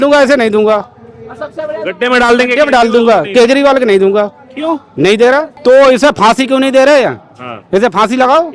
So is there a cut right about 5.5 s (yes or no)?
yes